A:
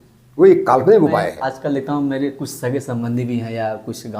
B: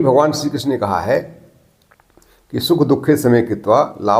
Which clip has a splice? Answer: A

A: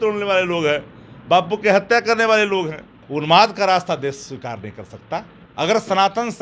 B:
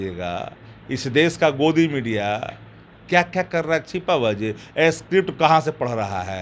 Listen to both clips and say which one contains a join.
A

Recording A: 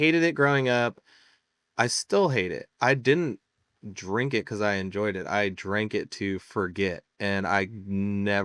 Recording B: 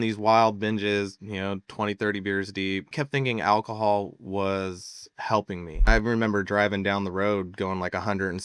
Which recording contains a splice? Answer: B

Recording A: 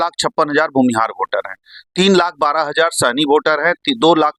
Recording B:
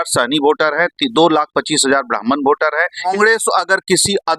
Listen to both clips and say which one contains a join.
B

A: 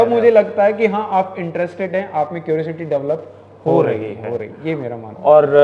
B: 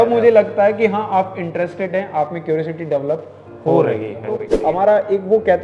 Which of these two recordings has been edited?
B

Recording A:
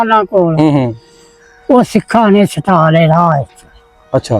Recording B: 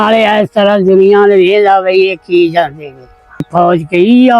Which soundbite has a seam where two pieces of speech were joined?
B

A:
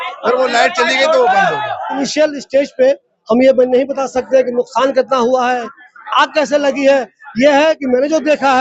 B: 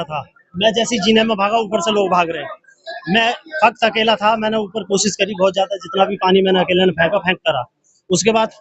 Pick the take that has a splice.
A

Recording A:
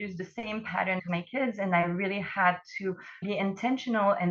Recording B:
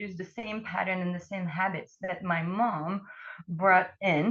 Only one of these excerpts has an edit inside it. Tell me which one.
A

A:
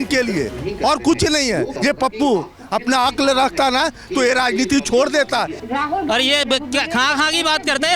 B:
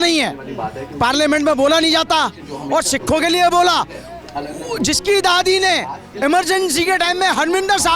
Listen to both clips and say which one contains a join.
A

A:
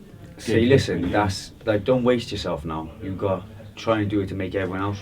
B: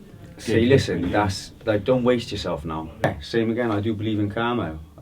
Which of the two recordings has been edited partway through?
B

